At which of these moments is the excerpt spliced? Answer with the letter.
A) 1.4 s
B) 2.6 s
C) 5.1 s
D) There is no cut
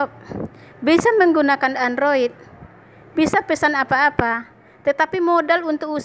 D